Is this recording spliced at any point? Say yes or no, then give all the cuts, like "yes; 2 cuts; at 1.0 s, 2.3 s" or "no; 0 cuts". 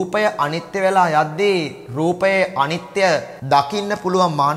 yes; 2 cuts; at 1.8 s, 3.3 s